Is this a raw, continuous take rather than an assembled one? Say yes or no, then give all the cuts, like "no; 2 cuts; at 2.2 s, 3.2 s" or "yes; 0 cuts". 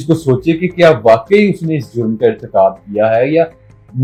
yes; 0 cuts